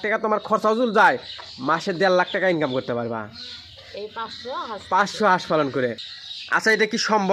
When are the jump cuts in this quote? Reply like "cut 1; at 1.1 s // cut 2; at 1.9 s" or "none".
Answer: cut 1; at 6.1 s